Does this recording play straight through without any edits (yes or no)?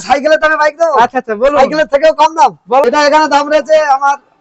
no